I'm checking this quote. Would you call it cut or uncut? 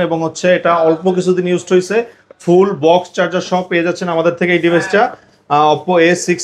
uncut